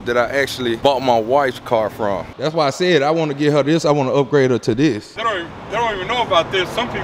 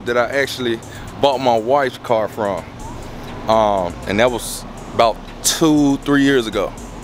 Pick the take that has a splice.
first; 3 cuts; at 0.8 s, 2.3 s, 5.1 s

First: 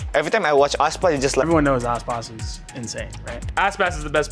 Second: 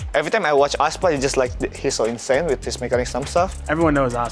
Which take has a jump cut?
first; 1 cut; at 1.4 s

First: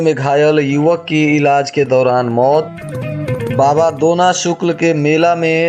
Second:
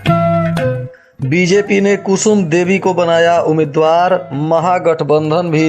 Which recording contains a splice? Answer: second; 1 cut; at 0.9 s

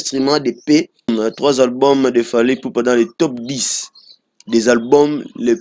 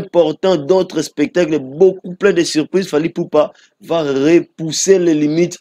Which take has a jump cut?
first; 1 cut; at 1.1 s

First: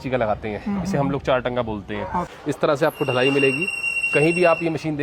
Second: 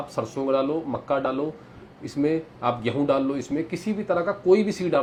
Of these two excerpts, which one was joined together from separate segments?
first; 1 cut; at 2.3 s

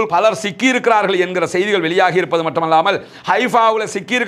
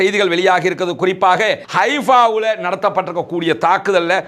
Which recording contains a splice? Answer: second; 1 cut; at 1.6 s

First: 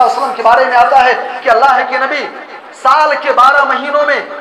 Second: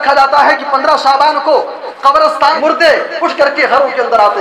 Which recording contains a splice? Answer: second; 1 cut; at 2.6 s

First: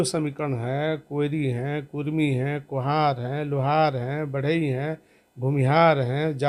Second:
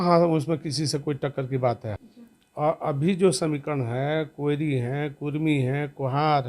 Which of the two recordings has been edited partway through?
second; 1 cut; at 1.9 s

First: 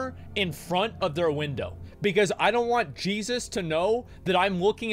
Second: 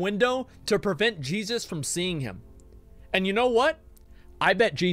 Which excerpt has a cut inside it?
first; 1 cut; at 1.8 s

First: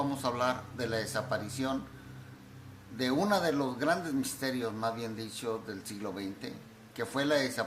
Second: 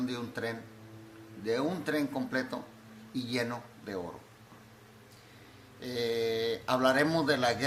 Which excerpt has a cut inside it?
first; 1 cut; at 5.8 s

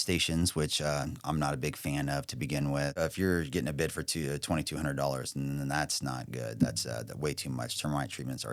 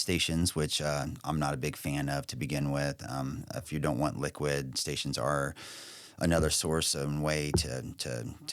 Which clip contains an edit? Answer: first; 1 cut; at 2.9 s

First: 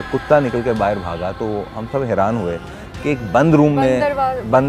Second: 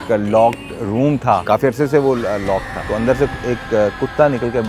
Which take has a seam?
second; 2 cuts; at 1.4 s, 2.8 s

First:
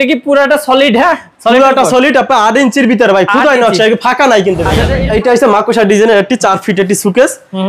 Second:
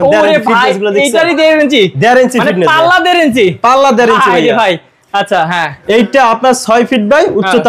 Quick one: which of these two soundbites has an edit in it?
first; 1 cut; at 4.8 s

